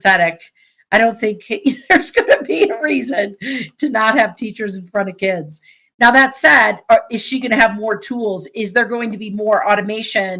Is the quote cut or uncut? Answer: uncut